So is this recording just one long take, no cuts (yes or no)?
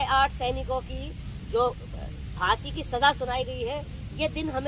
yes